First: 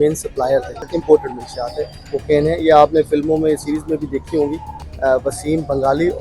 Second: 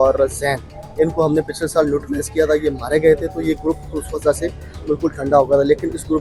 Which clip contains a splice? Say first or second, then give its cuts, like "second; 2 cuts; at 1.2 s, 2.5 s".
first; 2 cuts; at 0.9 s, 4.7 s